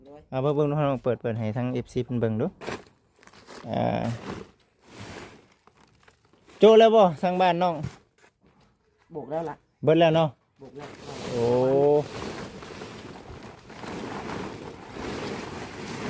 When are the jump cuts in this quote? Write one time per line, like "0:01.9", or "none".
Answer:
none